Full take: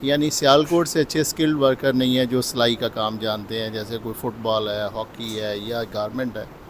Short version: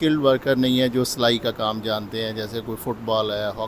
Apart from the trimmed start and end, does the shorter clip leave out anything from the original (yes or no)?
no